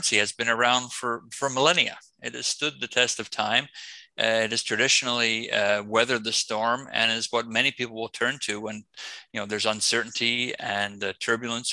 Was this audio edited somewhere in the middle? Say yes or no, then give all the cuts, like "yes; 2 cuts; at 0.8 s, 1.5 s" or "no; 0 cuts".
no; 0 cuts